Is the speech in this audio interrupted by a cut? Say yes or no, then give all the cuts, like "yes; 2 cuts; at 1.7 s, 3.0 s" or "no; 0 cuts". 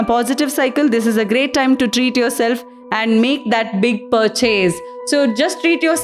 no; 0 cuts